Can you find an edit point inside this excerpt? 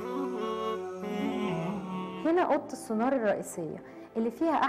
yes; 1 cut; at 1.8 s

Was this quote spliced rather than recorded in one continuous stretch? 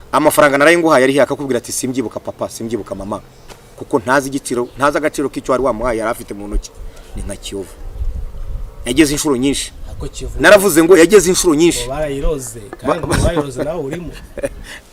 no; 0 cuts

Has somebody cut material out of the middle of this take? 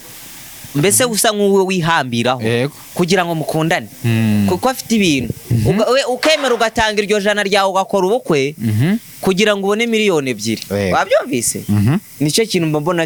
no; 0 cuts

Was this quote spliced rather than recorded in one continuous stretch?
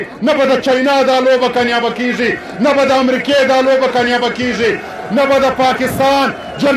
no; 0 cuts

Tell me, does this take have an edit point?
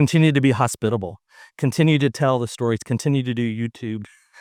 no; 0 cuts

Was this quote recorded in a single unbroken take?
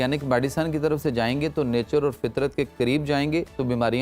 yes; 0 cuts

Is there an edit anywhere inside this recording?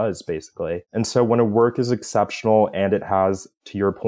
no; 0 cuts

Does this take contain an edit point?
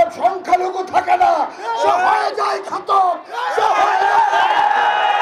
no; 0 cuts

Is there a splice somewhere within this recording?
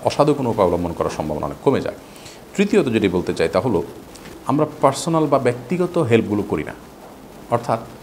no; 0 cuts

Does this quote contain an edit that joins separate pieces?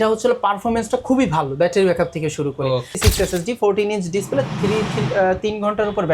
yes; 1 cut; at 2.9 s

